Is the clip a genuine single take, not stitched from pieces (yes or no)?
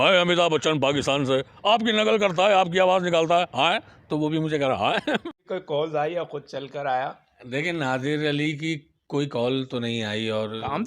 no